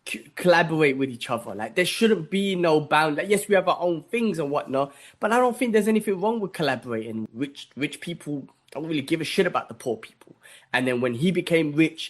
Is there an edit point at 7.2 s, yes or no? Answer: yes